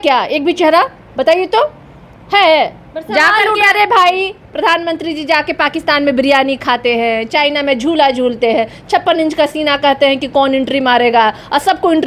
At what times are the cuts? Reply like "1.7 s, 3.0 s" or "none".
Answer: none